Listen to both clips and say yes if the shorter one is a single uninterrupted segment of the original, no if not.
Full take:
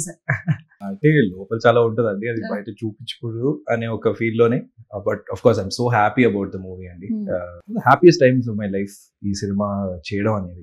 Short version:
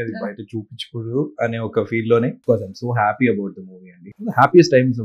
no